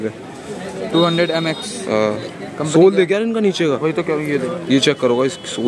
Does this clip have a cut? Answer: no; 0 cuts

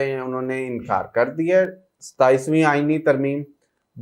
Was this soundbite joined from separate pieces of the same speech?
no; 0 cuts

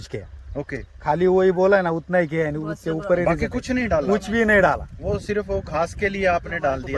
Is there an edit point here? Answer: no; 0 cuts

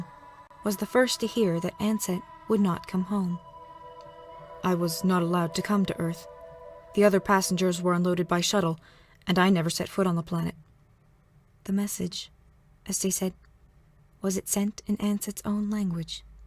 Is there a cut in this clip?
yes; 1 cut; at 3.4 s

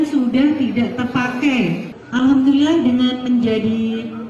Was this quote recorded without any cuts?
no; 1 cut; at 1.9 s

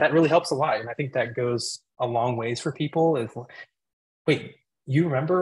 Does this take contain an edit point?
no; 0 cuts

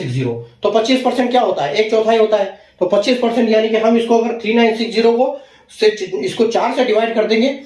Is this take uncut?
yes; 0 cuts

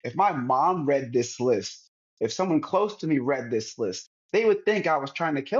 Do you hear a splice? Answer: no; 0 cuts

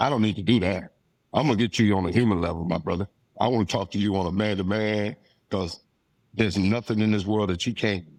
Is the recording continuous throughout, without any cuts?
yes; 0 cuts

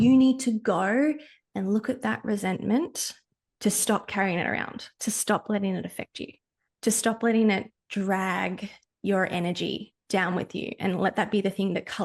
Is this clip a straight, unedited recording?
yes; 0 cuts

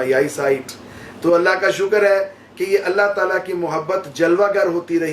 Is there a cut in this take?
no; 0 cuts

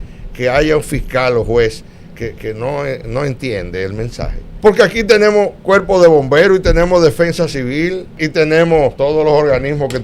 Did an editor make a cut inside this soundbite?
yes; 3 cuts; at 4.4 s, 8.2 s, 8.9 s

